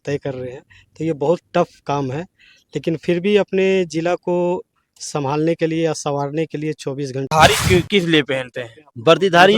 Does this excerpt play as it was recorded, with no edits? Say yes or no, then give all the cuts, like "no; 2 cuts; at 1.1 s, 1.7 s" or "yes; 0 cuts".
no; 1 cut; at 7.3 s